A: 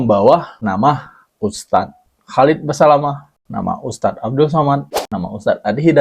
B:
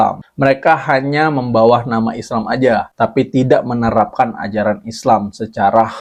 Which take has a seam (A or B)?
A